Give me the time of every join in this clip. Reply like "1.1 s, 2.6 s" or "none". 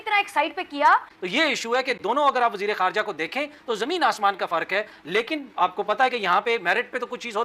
1.2 s